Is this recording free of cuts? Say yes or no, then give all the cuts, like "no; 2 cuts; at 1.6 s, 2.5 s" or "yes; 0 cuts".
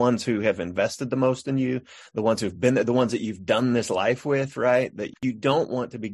no; 1 cut; at 5.2 s